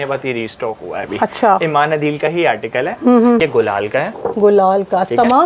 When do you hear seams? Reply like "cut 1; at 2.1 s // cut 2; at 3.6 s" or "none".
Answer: cut 1; at 3.4 s